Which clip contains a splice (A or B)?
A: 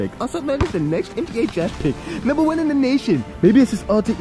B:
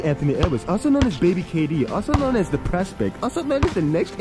A